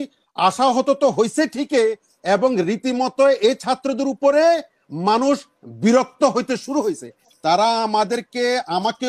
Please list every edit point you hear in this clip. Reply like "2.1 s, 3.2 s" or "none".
7.1 s